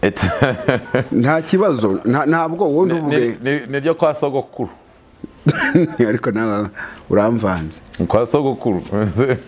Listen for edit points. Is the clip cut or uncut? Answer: uncut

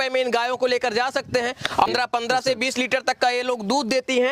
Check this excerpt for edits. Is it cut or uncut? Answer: cut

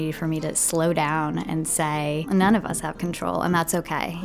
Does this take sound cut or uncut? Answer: cut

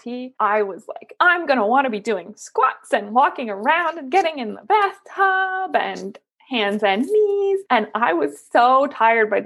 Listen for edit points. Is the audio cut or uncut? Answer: uncut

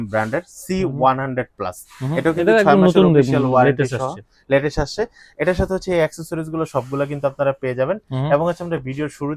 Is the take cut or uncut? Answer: uncut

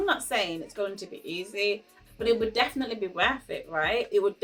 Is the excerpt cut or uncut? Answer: uncut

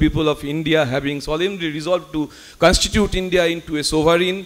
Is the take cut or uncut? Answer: uncut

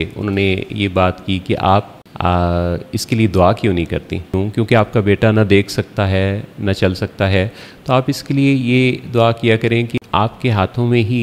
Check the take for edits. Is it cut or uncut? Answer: cut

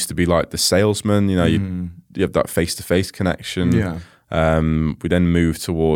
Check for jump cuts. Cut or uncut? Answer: uncut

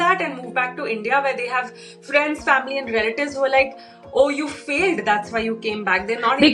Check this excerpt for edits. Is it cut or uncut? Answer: uncut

